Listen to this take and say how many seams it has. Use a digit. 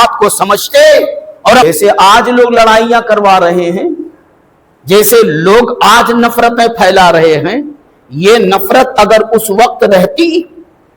1